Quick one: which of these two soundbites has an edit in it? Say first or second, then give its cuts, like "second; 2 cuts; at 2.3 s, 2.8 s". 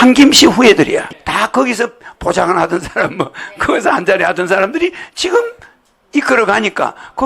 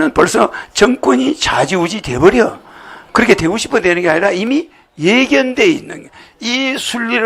first; 1 cut; at 1.0 s